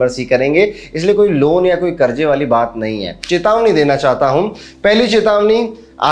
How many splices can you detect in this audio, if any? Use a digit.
1